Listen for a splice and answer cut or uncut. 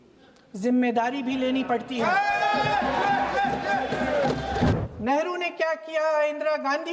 cut